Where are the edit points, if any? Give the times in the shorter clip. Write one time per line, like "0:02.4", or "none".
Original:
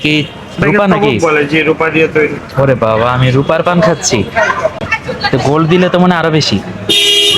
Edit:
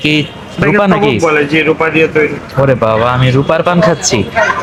none